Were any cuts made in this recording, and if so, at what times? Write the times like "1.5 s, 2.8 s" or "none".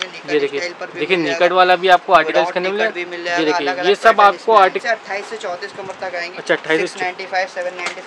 4.8 s